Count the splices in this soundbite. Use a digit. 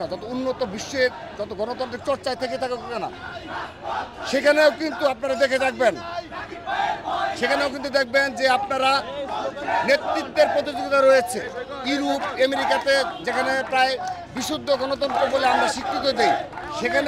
0